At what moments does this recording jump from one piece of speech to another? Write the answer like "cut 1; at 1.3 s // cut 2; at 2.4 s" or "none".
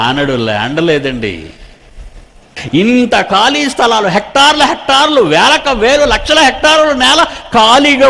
cut 1; at 2.5 s